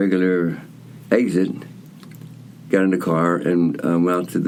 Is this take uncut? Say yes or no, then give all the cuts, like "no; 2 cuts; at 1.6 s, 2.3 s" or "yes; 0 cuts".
yes; 0 cuts